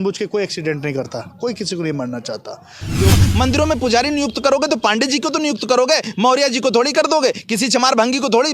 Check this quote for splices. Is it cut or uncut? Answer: cut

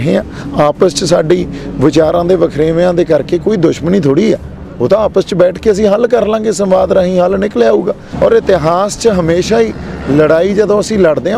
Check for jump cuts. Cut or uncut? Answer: cut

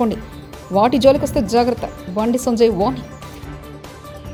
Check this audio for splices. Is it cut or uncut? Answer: uncut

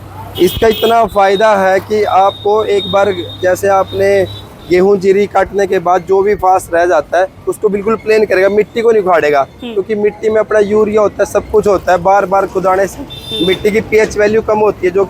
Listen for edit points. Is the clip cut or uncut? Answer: uncut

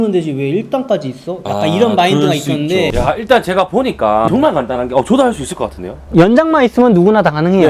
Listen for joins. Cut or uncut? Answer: cut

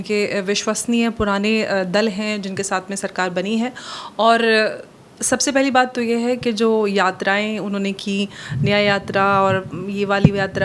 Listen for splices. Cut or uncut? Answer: uncut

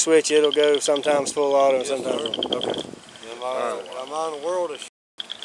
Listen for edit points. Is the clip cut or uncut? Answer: uncut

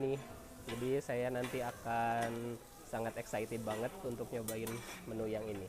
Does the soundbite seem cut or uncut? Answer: uncut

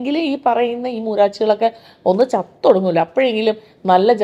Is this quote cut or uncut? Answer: uncut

